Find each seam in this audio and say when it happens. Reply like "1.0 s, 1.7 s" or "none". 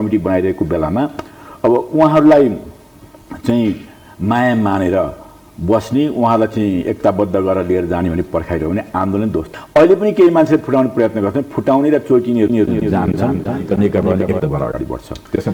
none